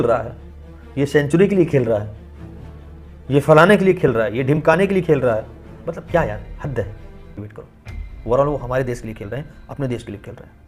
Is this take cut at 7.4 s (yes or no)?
yes